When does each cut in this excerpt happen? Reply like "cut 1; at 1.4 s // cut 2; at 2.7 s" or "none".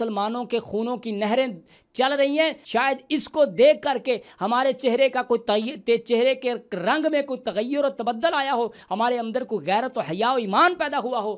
cut 1; at 2.6 s

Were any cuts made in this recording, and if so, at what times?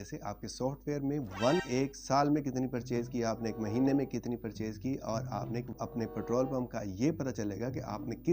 cut 1; at 1.6 s // cut 2; at 5.7 s

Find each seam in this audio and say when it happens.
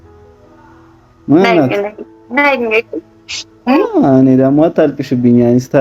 cut 1; at 1.1 s

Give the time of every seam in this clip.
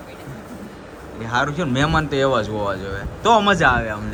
none

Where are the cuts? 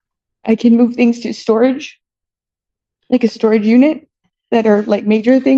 none

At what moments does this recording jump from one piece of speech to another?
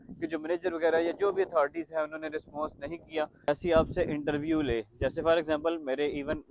cut 1; at 3.5 s

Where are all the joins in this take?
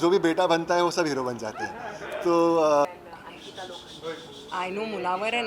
cut 1; at 2.9 s

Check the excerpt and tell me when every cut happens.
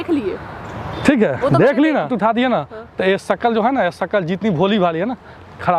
cut 1; at 2.1 s

